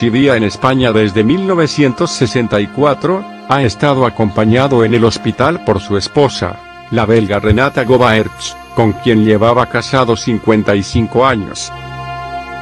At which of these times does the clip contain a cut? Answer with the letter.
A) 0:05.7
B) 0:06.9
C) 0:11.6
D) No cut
C